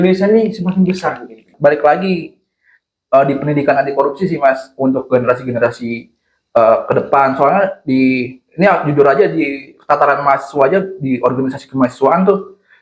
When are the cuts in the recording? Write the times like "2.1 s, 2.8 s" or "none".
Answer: 1.5 s

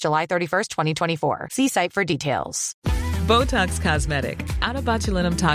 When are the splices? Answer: 2.6 s

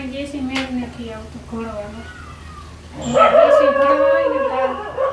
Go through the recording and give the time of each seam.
none

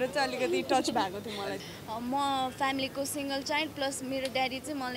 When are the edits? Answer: 1.6 s

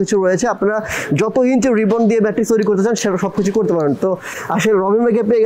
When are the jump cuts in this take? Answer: none

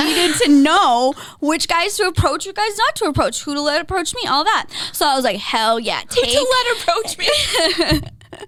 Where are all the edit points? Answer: none

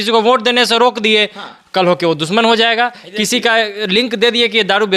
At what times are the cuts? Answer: none

